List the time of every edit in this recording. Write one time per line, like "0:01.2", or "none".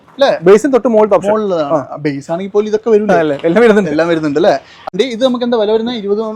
0:04.9